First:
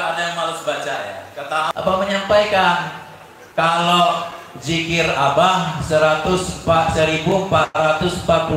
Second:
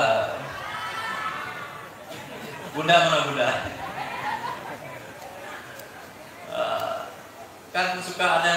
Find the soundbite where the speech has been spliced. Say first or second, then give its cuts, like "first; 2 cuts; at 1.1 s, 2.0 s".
first; 1 cut; at 1.7 s